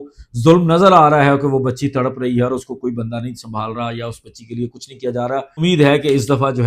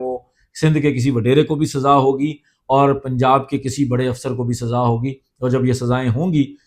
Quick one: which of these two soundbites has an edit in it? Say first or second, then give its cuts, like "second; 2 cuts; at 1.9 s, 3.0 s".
first; 1 cut; at 5.6 s